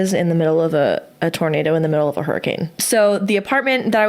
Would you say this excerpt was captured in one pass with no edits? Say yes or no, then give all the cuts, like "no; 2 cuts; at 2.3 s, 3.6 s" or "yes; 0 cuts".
no; 1 cut; at 2.7 s